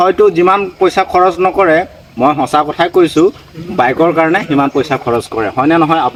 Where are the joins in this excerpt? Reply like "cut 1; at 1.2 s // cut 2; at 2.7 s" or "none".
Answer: none